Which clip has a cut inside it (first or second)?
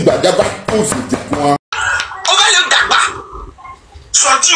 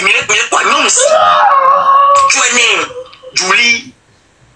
first